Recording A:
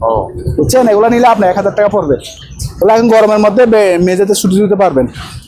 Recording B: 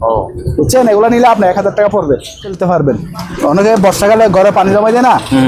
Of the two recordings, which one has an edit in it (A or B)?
B